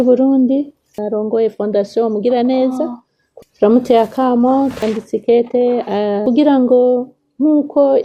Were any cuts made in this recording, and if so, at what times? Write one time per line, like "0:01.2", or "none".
0:01.0
0:03.2
0:06.2